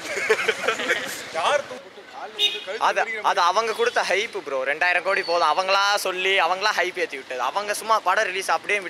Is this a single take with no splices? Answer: no; 1 cut; at 1.7 s

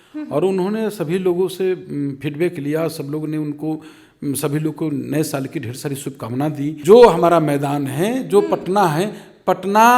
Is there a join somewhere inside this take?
yes; 1 cut; at 6.7 s

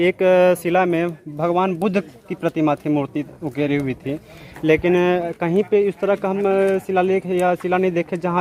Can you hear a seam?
no; 0 cuts

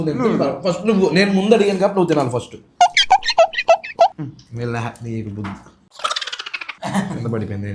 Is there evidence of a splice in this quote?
no; 0 cuts

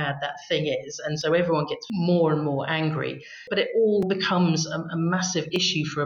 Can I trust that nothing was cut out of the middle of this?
no; 2 cuts; at 3.5 s, 4.1 s

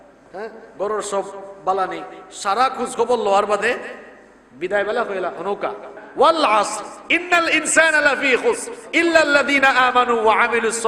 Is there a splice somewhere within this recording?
yes; 1 cut; at 6.0 s

